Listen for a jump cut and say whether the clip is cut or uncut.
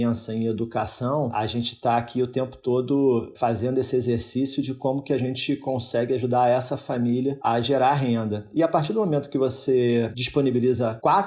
cut